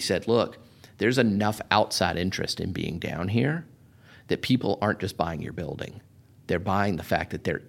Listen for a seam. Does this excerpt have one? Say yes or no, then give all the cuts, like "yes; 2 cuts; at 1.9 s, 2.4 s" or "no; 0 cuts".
no; 0 cuts